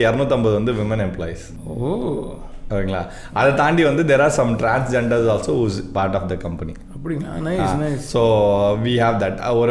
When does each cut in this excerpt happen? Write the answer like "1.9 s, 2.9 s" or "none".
none